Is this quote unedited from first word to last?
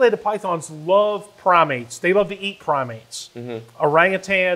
yes; 0 cuts

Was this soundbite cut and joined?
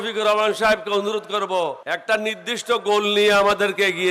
yes; 1 cut; at 2.0 s

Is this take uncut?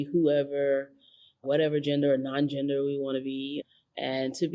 yes; 0 cuts

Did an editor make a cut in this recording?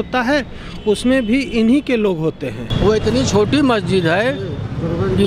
yes; 1 cut; at 2.6 s

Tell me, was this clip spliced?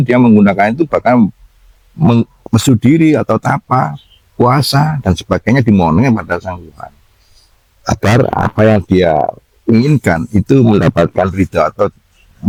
no; 0 cuts

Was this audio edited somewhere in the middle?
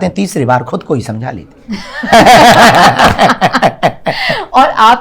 no; 0 cuts

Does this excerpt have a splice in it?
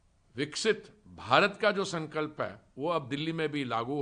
no; 0 cuts

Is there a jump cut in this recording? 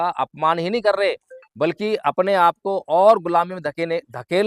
no; 0 cuts

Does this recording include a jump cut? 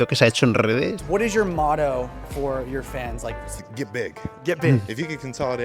yes; 2 cuts; at 1.0 s, 3.5 s

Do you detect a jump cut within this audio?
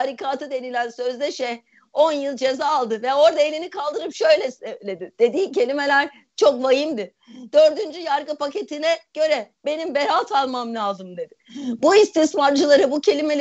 no; 0 cuts

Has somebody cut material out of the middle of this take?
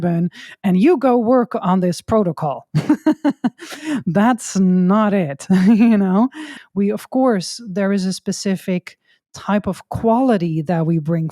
yes; 1 cut; at 6.5 s

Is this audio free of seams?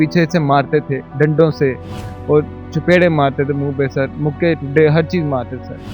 yes; 0 cuts

